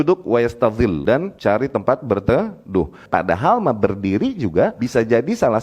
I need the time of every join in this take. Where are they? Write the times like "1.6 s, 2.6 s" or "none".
1.2 s, 3.0 s, 4.8 s